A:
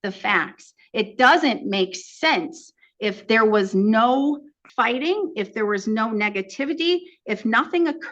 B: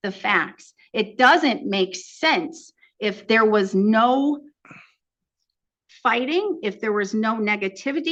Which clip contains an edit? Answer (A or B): A